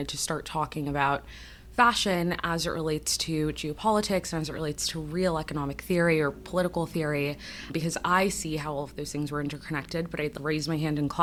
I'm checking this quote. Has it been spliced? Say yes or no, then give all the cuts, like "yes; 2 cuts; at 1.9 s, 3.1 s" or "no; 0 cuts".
no; 0 cuts